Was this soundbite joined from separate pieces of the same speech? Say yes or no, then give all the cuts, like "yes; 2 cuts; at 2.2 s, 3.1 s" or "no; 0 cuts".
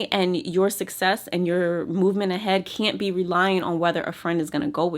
no; 0 cuts